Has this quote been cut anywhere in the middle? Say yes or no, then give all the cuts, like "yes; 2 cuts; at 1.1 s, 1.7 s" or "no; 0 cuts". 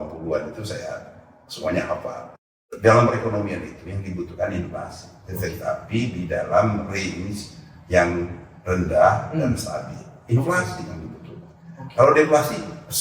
yes; 1 cut; at 2.3 s